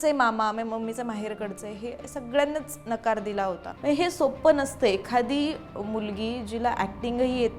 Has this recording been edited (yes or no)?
yes